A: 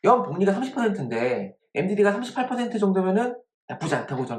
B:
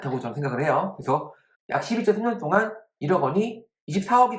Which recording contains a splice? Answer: B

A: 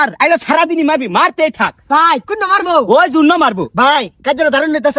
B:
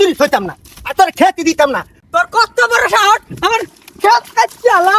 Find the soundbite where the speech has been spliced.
B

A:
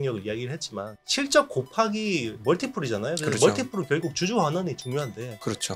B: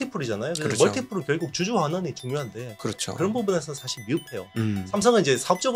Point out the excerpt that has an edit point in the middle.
A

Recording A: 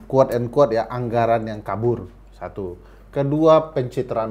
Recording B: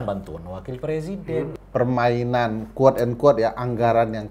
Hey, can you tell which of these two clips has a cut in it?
B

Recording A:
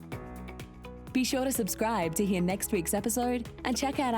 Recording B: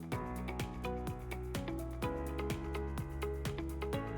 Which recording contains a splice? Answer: A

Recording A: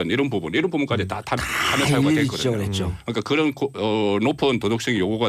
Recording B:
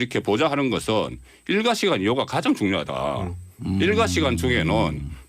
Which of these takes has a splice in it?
B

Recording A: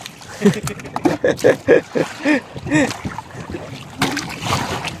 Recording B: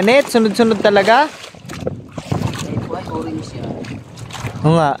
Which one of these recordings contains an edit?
B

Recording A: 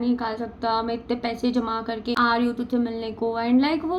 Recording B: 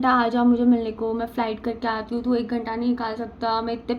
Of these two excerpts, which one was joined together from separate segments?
A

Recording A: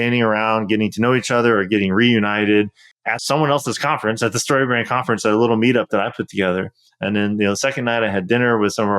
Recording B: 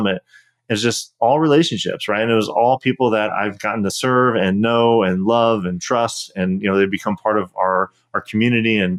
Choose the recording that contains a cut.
A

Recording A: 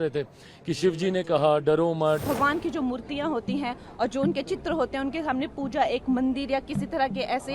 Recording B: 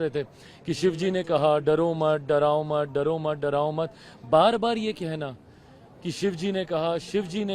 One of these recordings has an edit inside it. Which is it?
A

